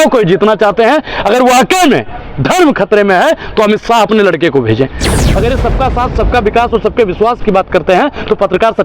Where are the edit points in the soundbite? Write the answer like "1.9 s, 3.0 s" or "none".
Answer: 5.1 s